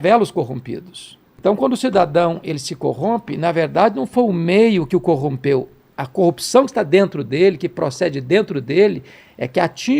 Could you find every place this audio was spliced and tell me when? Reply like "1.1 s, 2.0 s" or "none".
1.3 s